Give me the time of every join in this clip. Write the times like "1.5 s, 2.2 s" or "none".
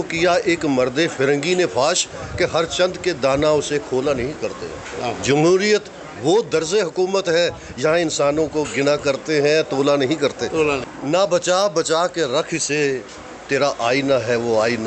10.8 s